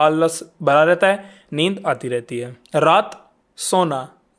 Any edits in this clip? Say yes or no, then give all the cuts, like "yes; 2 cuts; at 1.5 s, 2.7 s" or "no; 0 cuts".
yes; 1 cut; at 2.5 s